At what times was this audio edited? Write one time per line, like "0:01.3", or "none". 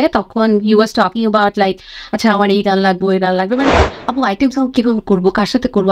0:03.8